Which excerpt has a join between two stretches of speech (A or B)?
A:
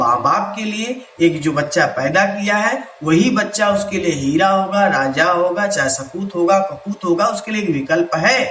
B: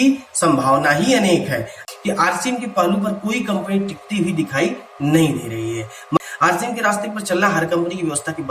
B